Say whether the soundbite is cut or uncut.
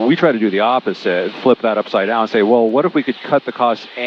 uncut